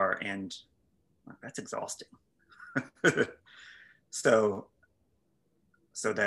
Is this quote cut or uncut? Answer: uncut